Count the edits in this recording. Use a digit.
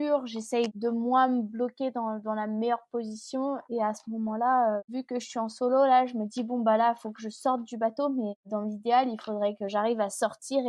2